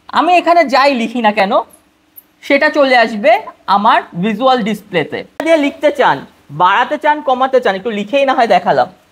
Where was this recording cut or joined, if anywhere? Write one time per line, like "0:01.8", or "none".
0:05.4